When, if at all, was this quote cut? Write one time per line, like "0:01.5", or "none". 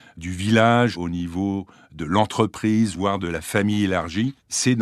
0:01.0